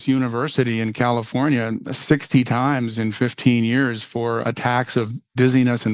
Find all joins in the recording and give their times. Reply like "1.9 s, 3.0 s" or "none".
4.8 s